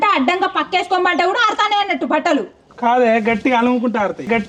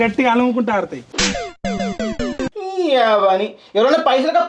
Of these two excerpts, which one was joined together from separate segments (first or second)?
second